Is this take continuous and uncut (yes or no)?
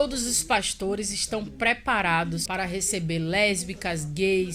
no